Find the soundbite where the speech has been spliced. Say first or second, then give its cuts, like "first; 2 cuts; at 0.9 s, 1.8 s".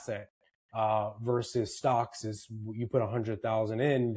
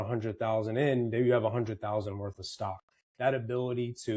second; 1 cut; at 2.9 s